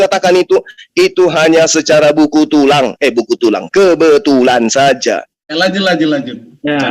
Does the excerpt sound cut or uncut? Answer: cut